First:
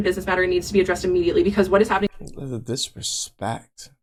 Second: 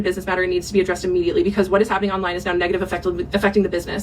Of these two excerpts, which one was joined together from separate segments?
second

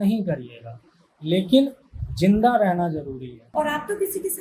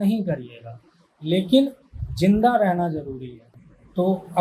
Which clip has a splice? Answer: first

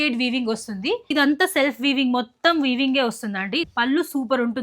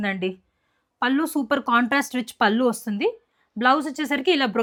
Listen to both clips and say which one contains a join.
first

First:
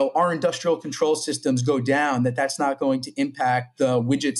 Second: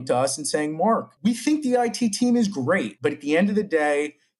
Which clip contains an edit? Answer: second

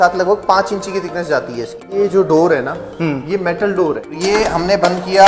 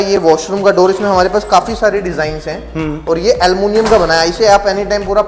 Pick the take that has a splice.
first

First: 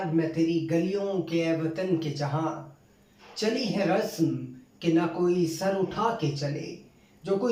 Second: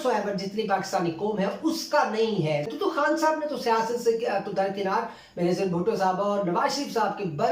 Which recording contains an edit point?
second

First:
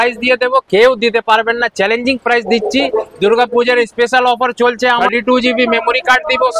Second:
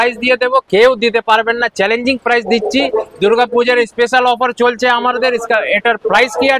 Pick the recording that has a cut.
first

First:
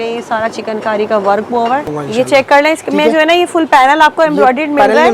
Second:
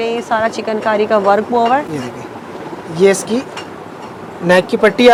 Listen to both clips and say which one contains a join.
first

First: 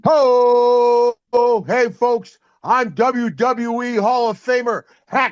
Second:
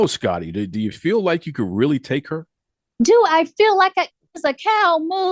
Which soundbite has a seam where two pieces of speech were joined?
second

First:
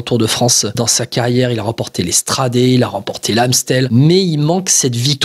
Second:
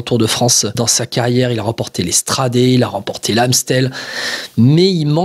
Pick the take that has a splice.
first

